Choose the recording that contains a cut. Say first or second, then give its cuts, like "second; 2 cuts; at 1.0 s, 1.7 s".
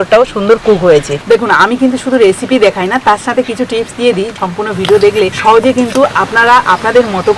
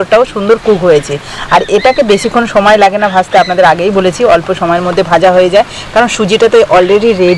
first; 2 cuts; at 1.1 s, 4.3 s